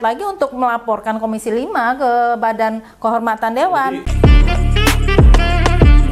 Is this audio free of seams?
yes; 0 cuts

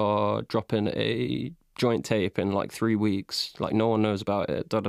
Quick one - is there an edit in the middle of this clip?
no; 0 cuts

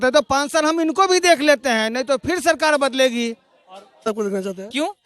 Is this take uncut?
no; 1 cut; at 4.1 s

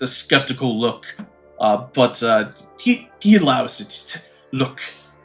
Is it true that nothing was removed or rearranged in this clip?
yes; 0 cuts

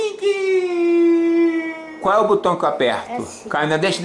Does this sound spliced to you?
yes; 1 cut; at 1.8 s

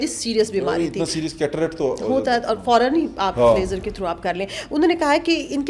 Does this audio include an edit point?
no; 0 cuts

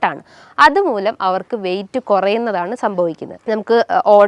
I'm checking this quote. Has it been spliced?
yes; 1 cut; at 3.3 s

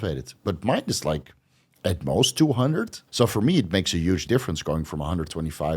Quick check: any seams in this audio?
yes; 2 cuts; at 3.0 s, 4.2 s

